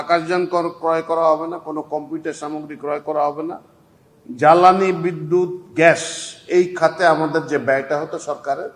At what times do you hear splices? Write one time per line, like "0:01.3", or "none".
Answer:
0:03.8